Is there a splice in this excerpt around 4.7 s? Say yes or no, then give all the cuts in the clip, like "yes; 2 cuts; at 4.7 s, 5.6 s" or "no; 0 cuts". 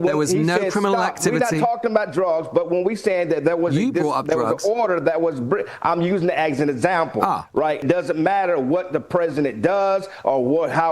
no; 1 cut; at 7.8 s